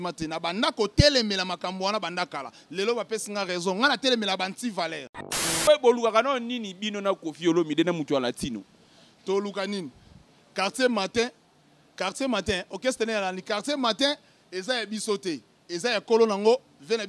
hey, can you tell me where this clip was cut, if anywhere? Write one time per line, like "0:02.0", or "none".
0:05.6